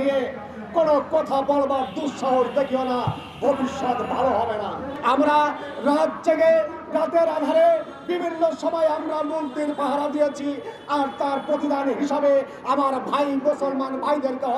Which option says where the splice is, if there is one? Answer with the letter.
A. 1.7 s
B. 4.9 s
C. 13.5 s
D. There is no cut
B